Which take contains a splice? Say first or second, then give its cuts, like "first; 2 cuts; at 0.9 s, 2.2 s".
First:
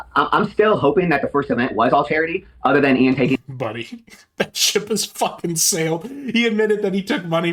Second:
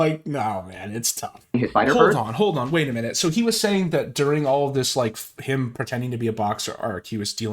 second; 1 cut; at 1.7 s